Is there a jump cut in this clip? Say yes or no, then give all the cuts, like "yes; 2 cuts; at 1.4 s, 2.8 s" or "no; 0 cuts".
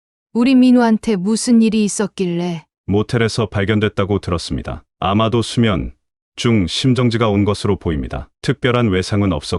yes; 1 cut; at 2.7 s